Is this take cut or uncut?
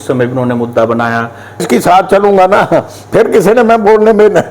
cut